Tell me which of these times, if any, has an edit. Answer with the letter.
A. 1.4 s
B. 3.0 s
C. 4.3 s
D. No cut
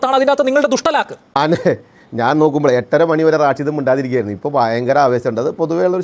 A